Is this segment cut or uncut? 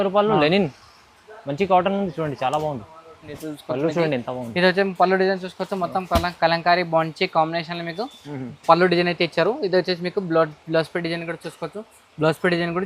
cut